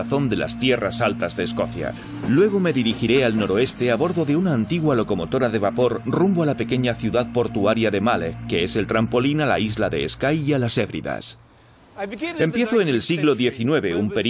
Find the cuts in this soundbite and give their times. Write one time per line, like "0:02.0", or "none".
0:10.7